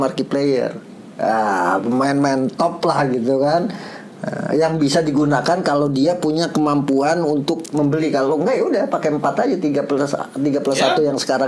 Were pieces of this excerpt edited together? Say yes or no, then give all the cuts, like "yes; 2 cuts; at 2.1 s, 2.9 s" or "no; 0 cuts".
no; 0 cuts